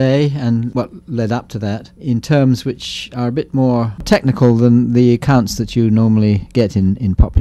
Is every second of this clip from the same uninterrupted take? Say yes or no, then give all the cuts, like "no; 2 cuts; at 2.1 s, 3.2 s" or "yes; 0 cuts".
no; 1 cut; at 1.5 s